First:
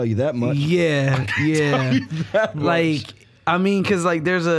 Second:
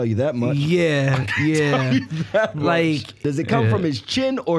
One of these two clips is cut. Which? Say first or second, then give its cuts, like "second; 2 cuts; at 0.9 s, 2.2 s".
second; 1 cut; at 3.2 s